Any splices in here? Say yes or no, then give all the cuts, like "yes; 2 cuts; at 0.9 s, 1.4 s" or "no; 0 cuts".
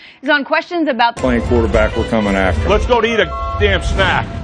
no; 0 cuts